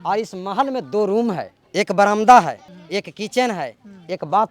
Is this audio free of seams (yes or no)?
no